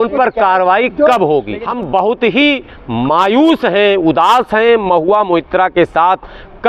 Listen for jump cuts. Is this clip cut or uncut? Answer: cut